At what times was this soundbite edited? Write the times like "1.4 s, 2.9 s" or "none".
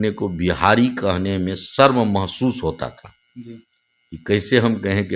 none